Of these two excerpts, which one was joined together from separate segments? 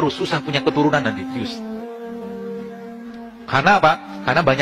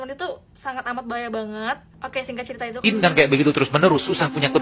second; 1 cut; at 2.8 s

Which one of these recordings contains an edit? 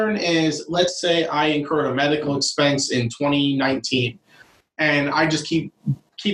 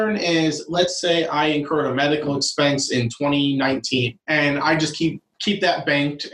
second; 2 cuts; at 4.2 s, 5.3 s

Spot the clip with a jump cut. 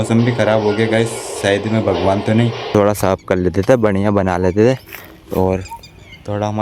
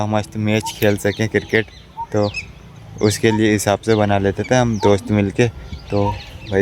first; 1 cut; at 2.7 s

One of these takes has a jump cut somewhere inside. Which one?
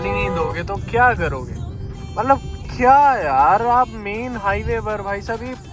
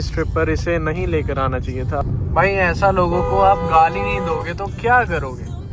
second; 1 cut; at 2.0 s

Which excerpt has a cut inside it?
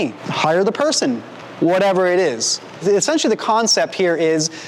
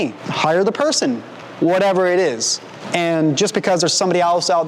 second; 1 cut; at 2.7 s

